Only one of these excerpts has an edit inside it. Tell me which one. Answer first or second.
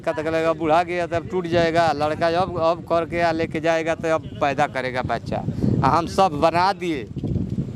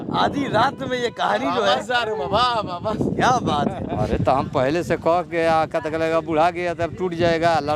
second